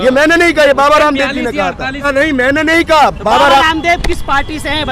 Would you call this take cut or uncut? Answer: cut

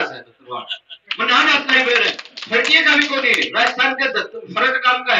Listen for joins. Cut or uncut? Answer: uncut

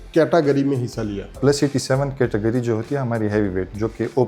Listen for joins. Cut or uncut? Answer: cut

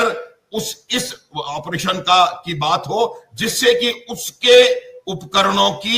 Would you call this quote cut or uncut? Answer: uncut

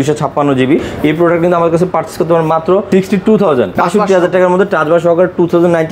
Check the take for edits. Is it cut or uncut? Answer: uncut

